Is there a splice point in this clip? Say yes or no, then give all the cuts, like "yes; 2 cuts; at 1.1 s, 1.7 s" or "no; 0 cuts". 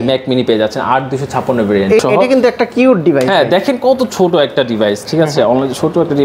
yes; 1 cut; at 2.0 s